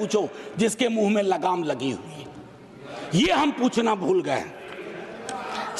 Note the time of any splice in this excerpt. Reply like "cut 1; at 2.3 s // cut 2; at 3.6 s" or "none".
none